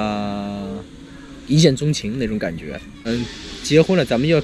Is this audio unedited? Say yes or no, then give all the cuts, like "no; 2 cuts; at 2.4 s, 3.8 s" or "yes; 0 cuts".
no; 1 cut; at 3.1 s